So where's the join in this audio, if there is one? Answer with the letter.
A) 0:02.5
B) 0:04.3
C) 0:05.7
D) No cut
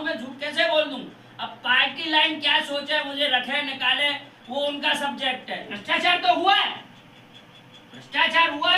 C